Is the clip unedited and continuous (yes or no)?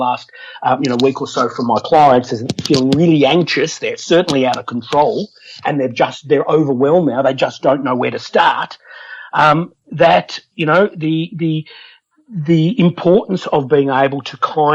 yes